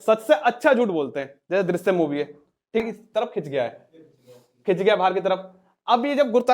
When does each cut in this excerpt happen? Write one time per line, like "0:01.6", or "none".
0:02.8